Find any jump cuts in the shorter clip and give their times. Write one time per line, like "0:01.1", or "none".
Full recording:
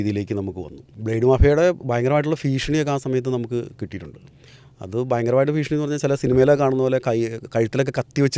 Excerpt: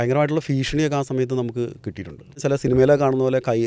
0:02.4